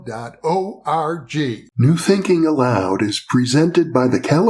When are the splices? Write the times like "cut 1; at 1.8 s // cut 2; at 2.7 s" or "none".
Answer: cut 1; at 1.6 s